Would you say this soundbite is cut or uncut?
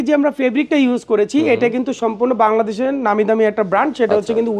uncut